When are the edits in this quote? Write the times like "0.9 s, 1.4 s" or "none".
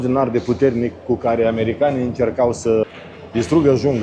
none